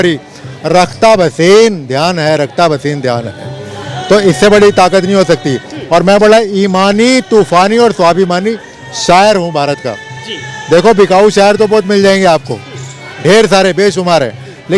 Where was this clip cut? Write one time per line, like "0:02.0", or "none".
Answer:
none

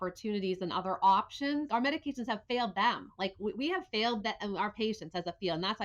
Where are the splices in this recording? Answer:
0:01.7

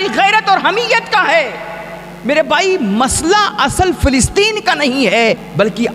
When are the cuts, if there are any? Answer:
none

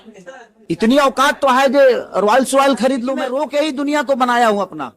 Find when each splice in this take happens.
0:03.2

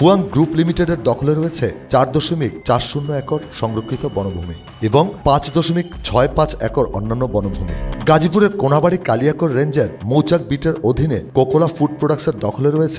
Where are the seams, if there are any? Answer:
0:07.9

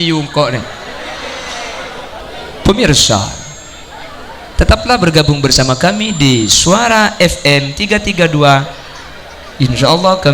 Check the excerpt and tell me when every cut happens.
0:02.2

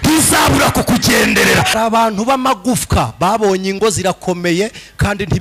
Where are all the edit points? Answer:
0:01.7

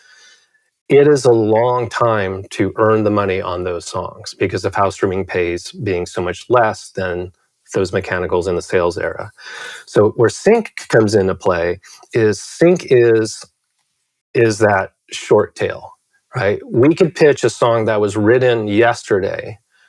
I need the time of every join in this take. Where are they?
none

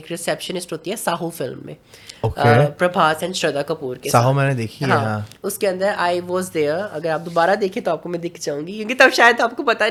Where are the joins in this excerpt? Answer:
none

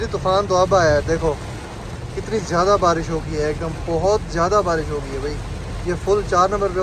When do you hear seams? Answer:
none

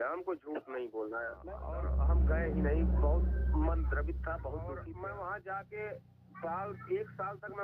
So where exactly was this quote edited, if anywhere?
0:01.6
0:04.7

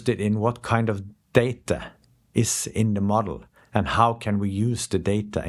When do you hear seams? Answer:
none

